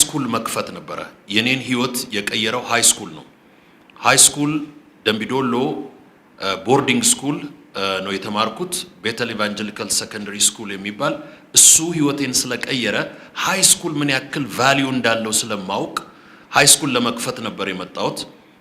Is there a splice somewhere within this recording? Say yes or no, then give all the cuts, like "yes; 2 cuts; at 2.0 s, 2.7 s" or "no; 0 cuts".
no; 0 cuts